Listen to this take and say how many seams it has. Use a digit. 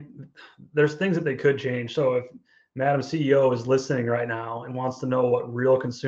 0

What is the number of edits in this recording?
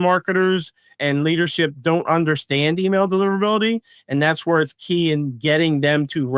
1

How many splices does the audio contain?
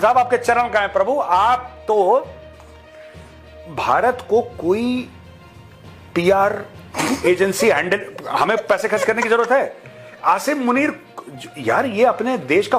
0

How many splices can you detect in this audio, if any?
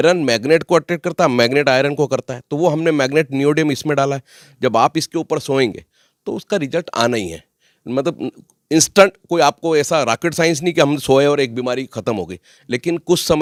0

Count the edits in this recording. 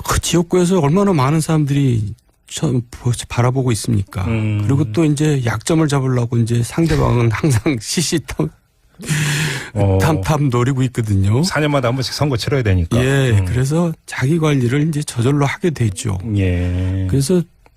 0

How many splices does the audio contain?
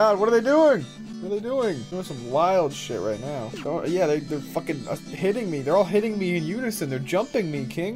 3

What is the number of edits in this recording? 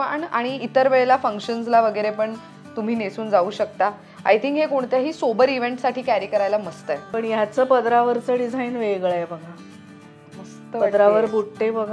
1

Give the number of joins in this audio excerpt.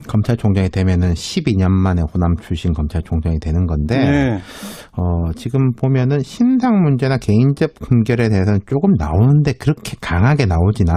0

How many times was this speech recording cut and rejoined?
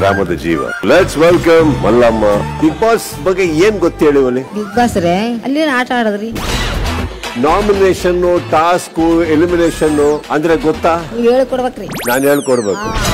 0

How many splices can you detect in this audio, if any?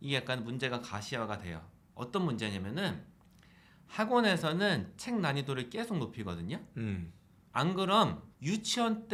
0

